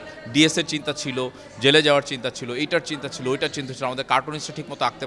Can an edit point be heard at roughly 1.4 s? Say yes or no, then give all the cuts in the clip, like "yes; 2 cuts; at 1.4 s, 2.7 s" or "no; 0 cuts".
no; 0 cuts